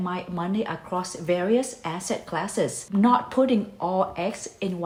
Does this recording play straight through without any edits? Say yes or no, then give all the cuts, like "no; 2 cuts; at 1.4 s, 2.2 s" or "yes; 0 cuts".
yes; 0 cuts